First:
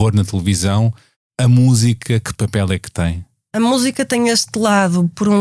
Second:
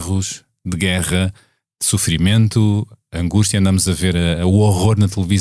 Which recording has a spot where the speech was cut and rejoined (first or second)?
first